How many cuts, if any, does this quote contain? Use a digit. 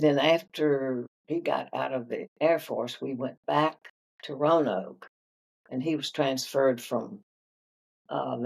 2